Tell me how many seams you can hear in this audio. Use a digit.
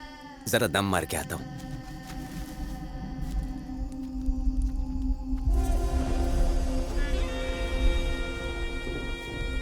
0